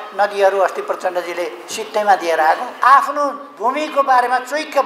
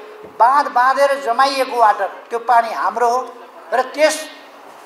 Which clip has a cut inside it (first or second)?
first